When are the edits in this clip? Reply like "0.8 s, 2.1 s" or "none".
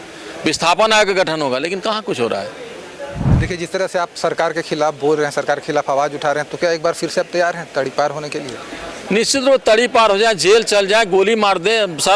3.2 s

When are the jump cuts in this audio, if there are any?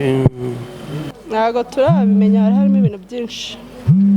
1.1 s

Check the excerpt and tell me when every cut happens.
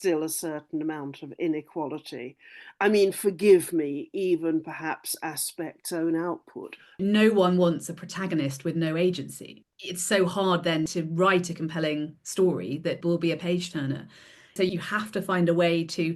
7.0 s, 9.5 s, 10.9 s, 13.0 s, 14.6 s

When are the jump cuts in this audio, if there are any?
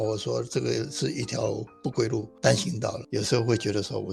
2.3 s, 3.0 s

